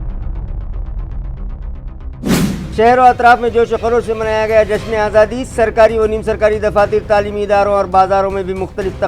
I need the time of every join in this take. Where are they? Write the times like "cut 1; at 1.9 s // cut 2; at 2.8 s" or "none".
cut 1; at 2.7 s